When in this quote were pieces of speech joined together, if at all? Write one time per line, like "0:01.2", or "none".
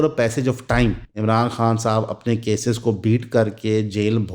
0:01.1